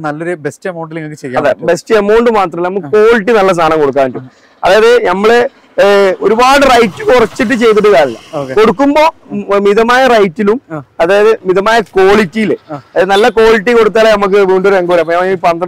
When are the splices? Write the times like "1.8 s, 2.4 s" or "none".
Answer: none